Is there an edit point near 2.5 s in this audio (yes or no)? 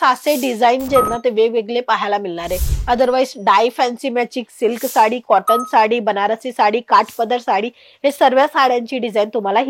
no